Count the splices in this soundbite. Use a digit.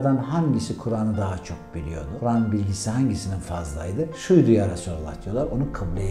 2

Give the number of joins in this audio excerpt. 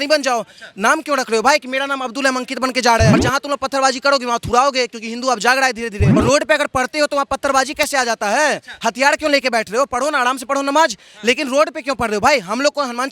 2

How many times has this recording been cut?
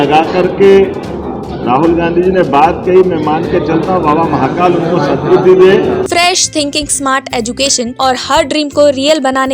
2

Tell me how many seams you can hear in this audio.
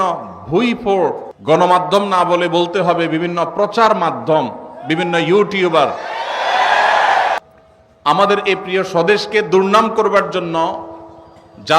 2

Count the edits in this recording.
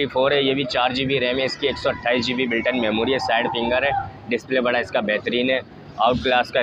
0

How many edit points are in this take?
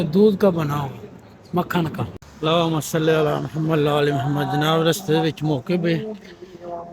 1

